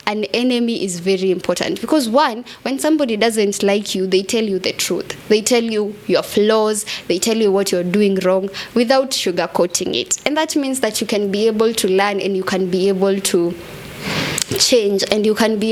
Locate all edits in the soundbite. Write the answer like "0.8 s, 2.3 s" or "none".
none